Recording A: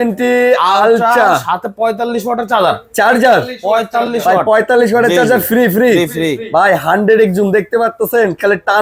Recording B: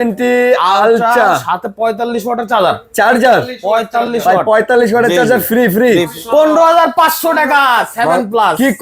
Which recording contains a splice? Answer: B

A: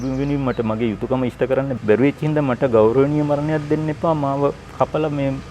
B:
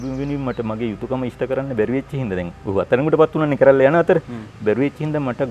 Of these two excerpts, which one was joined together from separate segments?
A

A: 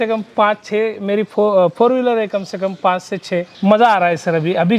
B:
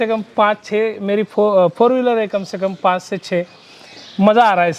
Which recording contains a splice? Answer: A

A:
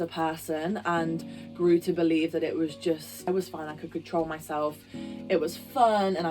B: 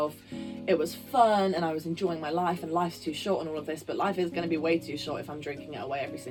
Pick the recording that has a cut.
A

